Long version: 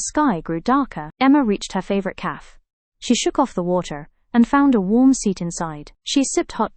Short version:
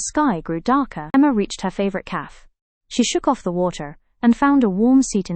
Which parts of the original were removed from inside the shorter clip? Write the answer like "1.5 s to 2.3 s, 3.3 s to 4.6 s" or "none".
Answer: 1.1 s to 1.2 s